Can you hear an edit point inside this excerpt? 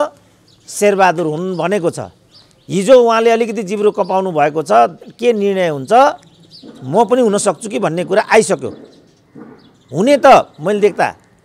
no; 0 cuts

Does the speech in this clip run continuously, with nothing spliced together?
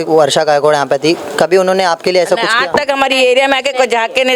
yes; 0 cuts

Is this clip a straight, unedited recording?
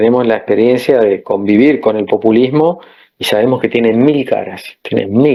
yes; 0 cuts

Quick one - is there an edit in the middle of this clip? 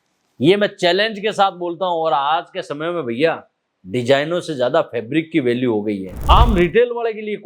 yes; 1 cut; at 6.1 s

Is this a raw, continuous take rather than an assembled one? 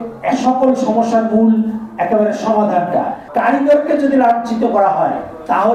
no; 1 cut; at 3.2 s

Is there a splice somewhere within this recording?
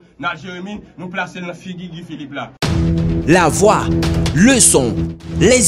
yes; 1 cut; at 2.6 s

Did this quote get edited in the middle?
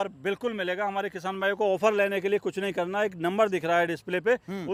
no; 0 cuts

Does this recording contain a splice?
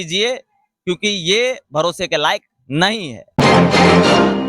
yes; 1 cut; at 3.3 s

